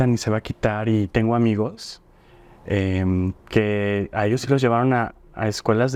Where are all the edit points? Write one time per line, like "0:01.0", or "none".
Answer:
none